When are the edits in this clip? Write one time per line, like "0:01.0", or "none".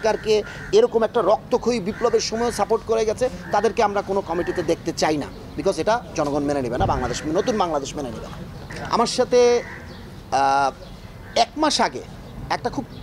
none